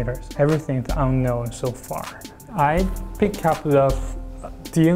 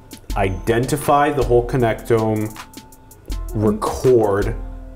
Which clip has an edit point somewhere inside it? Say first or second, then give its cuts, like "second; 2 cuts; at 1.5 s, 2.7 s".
first; 1 cut; at 2.4 s